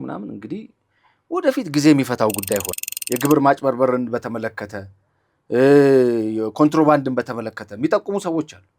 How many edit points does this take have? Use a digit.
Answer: 1